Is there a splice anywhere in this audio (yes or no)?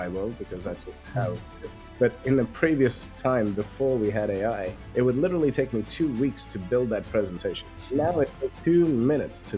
yes